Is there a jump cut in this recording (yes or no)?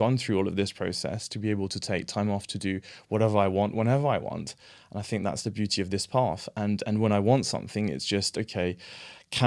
no